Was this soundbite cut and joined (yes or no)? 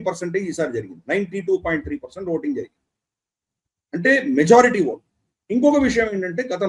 no